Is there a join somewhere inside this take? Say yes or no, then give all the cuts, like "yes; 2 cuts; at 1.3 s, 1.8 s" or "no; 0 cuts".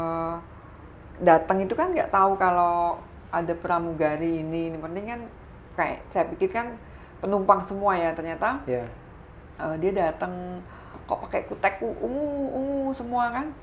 no; 0 cuts